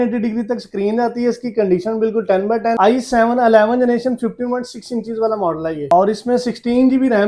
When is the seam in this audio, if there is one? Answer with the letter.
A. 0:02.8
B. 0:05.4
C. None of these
A